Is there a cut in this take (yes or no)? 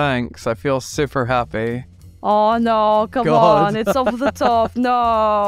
yes